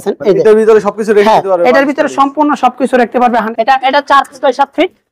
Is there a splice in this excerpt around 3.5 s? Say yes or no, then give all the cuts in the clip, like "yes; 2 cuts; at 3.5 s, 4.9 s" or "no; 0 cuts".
yes; 1 cut; at 3.5 s